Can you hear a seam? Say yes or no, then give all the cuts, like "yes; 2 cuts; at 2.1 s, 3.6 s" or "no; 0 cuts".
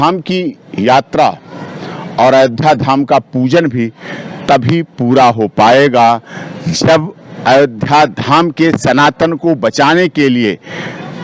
no; 0 cuts